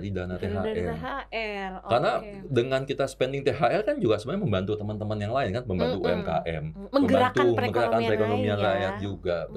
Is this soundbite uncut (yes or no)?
yes